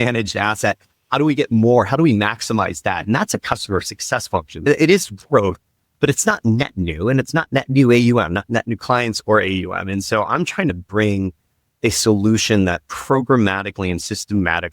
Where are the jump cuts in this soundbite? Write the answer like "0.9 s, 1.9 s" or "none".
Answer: 4.6 s, 10.8 s